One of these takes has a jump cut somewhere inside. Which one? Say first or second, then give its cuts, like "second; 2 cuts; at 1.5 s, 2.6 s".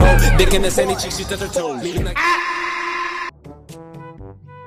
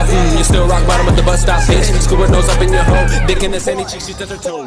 first; 1 cut; at 3.4 s